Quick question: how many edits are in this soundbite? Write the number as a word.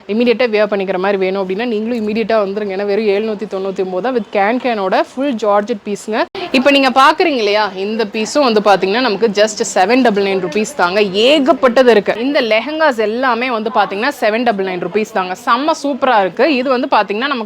two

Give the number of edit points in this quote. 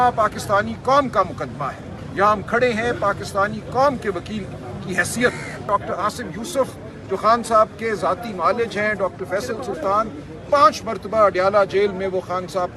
one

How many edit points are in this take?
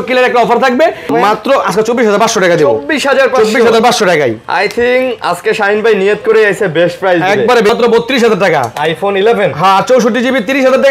two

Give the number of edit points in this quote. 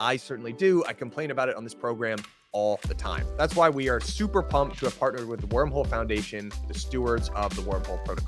zero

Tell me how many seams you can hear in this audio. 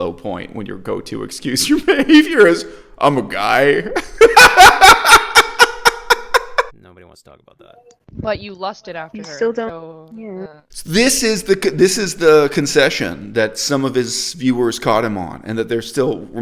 one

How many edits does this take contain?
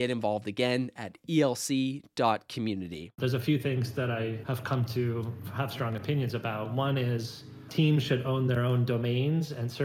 three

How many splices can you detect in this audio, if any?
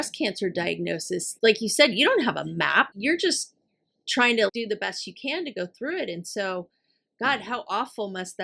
three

